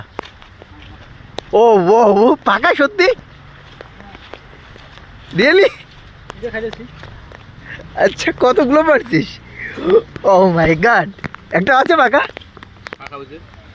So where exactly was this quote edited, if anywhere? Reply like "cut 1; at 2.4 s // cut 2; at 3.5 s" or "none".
none